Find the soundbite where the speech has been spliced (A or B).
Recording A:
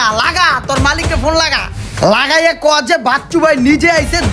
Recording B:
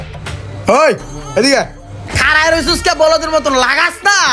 B